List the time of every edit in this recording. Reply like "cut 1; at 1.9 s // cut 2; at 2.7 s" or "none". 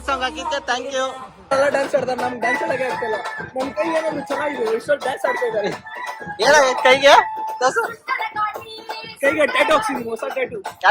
cut 1; at 1.5 s